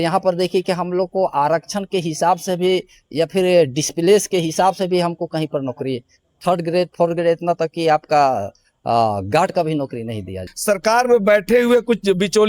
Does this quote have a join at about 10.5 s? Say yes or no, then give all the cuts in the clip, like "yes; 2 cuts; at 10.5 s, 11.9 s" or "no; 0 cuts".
yes; 1 cut; at 10.5 s